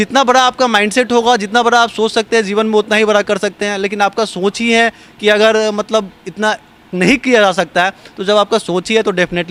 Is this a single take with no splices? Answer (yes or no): yes